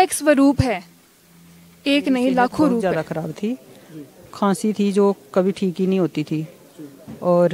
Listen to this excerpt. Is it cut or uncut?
cut